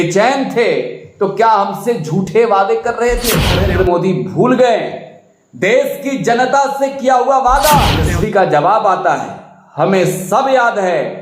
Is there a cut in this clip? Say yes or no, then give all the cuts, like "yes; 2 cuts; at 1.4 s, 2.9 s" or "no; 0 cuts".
yes; 2 cuts; at 3.6 s, 8.1 s